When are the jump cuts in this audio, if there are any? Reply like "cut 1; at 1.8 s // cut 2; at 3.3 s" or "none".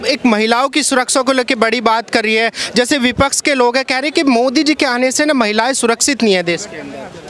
none